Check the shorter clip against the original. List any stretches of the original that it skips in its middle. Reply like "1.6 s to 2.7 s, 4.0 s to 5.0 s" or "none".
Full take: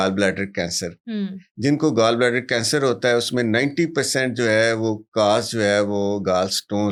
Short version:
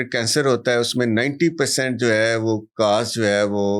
none